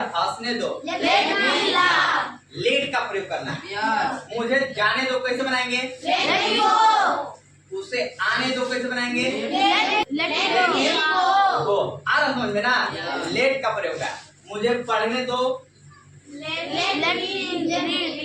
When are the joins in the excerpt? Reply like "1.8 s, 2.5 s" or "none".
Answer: 10.0 s

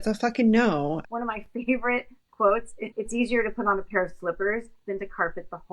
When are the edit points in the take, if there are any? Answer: 1.0 s, 2.8 s

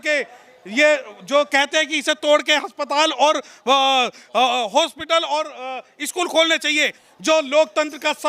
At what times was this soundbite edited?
7.0 s

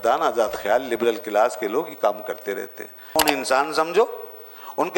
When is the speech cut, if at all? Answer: 3.2 s

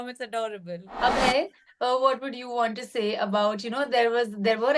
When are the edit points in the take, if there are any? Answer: 0.9 s

